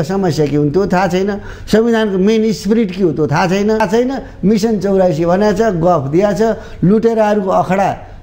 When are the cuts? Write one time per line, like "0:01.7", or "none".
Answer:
0:03.8